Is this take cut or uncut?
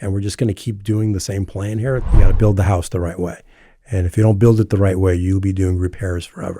cut